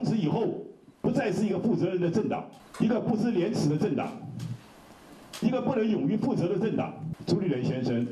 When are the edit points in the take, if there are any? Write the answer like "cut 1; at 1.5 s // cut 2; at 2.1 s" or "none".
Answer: cut 1; at 2.6 s // cut 2; at 7.1 s